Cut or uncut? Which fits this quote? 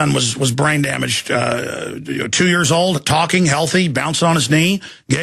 cut